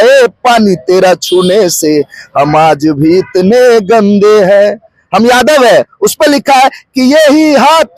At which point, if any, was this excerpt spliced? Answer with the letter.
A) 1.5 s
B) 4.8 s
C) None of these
C